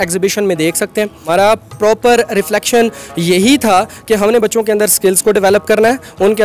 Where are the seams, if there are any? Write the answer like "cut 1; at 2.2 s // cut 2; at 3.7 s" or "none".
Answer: cut 1; at 1.2 s